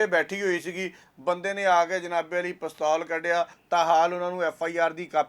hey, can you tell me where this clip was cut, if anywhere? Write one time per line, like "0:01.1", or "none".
0:03.6